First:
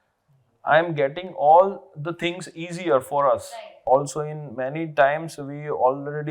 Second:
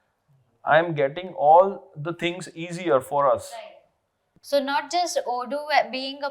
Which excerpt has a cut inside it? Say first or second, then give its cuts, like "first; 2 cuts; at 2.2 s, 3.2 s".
first; 1 cut; at 3.9 s